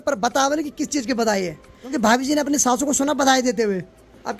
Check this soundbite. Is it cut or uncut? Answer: uncut